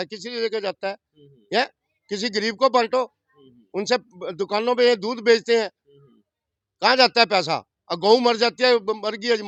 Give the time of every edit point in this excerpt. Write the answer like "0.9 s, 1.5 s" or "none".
none